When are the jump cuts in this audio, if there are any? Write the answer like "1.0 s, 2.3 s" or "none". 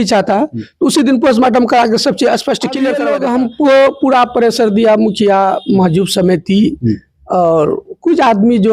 3.0 s